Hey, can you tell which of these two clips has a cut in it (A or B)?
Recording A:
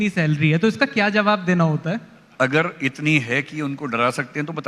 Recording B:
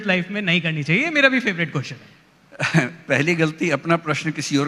A